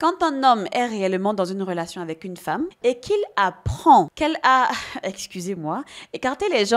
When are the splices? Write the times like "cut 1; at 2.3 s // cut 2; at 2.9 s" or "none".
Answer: cut 1; at 2.7 s